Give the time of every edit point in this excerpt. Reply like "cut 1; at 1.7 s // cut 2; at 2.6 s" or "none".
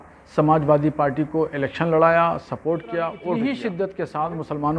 cut 1; at 3.2 s